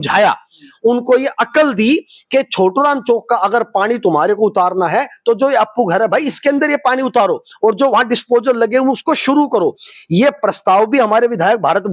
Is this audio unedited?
yes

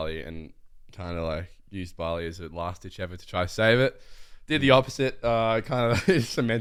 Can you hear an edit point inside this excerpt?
no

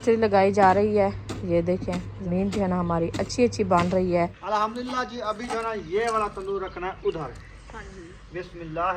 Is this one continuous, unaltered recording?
no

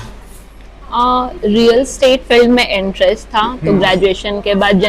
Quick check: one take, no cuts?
yes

